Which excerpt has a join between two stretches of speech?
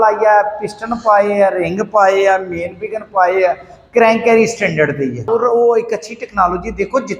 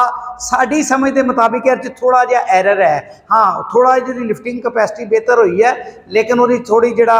first; 1 cut; at 5.2 s

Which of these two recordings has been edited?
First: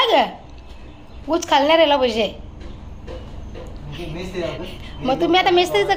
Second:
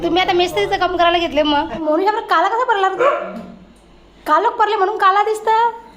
second; 1 cut; at 1.8 s

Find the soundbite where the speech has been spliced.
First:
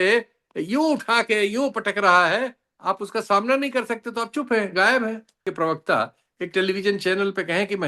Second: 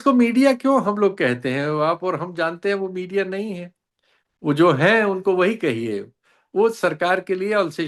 first; 1 cut; at 5.4 s

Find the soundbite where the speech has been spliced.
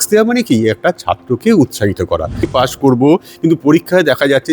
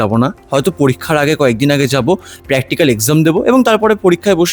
first; 1 cut; at 2.5 s

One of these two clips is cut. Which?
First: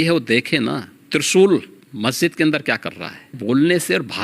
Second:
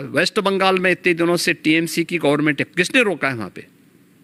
first; 3 cuts; at 0.9 s, 1.8 s, 3.4 s

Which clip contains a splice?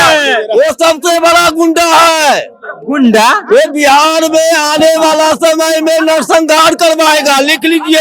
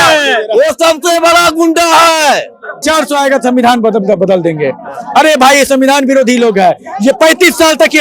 second; 1 cut; at 2.8 s

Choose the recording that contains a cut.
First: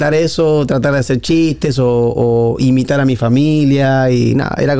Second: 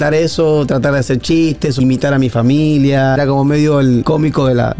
second; 3 cuts; at 1.8 s, 3.2 s, 4.0 s

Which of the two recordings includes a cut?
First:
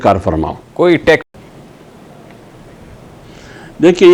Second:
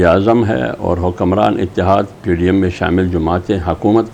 first; 1 cut; at 1.2 s

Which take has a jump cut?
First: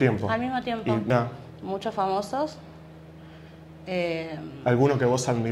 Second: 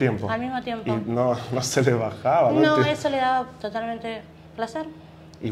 first; 1 cut; at 1.1 s

